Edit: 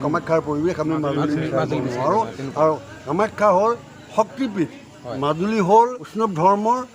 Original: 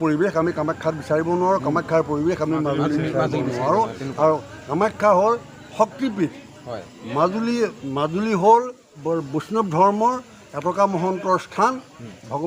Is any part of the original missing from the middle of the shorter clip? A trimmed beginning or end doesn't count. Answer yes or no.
yes